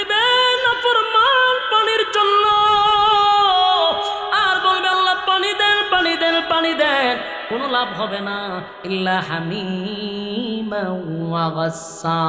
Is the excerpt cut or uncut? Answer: uncut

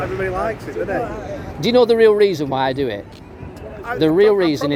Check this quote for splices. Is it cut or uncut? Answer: uncut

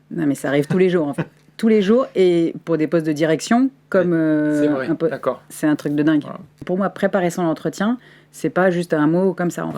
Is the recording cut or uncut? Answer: cut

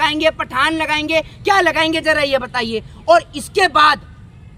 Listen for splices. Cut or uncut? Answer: uncut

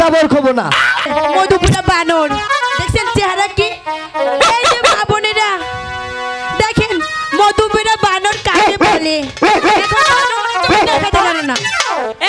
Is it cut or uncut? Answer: cut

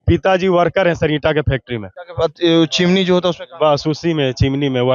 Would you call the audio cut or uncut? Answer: uncut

